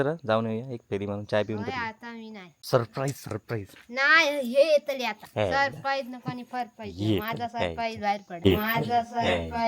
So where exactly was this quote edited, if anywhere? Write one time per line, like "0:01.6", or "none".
0:02.5
0:05.2